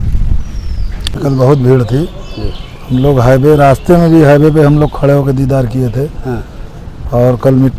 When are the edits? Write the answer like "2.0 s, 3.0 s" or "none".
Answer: 1.1 s